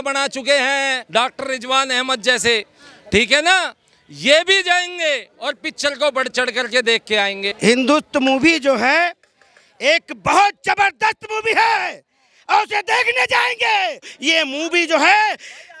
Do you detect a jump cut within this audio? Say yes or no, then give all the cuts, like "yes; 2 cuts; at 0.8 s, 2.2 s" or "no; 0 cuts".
yes; 2 cuts; at 7.5 s, 14.1 s